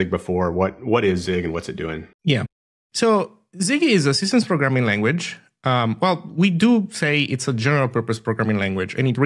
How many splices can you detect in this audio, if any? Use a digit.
0